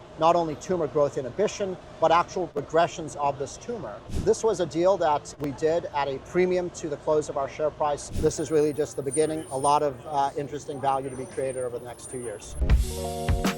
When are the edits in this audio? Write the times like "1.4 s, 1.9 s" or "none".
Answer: 2.6 s, 4.1 s, 5.3 s, 8.1 s, 12.5 s